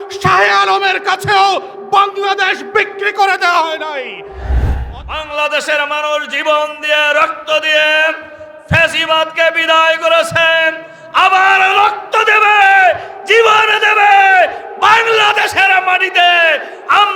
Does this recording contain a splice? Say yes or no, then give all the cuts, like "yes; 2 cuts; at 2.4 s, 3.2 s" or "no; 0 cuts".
yes; 1 cut; at 4.7 s